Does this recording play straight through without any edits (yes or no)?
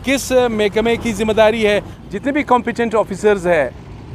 no